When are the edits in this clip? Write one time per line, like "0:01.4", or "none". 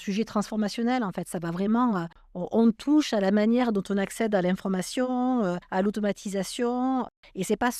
none